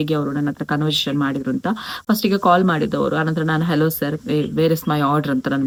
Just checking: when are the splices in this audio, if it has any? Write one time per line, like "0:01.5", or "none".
none

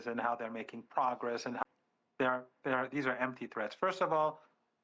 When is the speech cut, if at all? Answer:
0:01.6

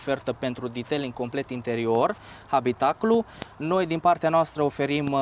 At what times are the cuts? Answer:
none

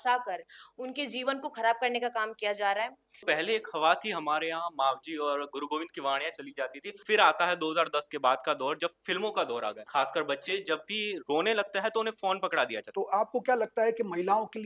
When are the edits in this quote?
0:03.1
0:07.0
0:09.8
0:12.8

